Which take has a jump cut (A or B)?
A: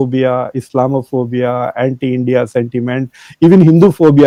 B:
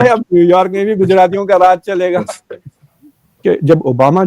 B